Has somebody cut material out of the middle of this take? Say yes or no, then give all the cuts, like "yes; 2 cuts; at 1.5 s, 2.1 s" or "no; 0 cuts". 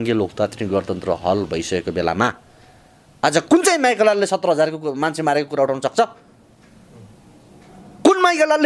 no; 0 cuts